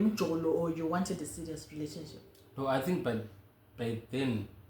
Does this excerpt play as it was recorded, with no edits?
yes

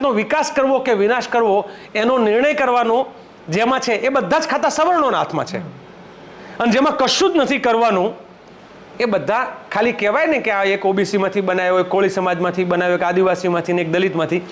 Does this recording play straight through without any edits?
yes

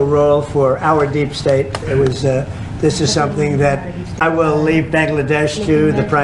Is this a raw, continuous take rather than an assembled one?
no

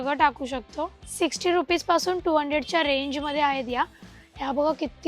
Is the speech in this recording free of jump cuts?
no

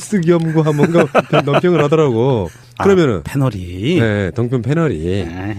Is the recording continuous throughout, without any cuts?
yes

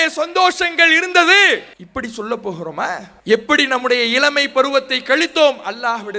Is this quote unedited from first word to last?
no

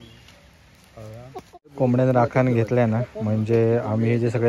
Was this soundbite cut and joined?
yes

